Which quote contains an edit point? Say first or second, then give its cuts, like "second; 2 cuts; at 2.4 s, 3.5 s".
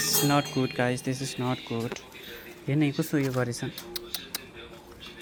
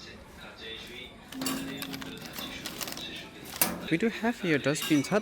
second; 1 cut; at 3.9 s